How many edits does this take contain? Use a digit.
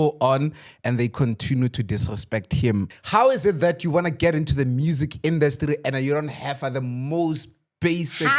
1